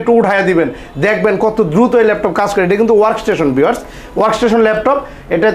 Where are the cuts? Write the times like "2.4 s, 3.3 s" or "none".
none